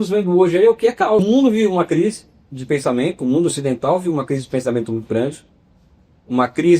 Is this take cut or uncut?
cut